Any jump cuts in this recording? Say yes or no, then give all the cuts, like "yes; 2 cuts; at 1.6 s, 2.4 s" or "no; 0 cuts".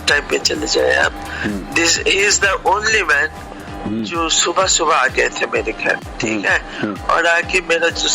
no; 0 cuts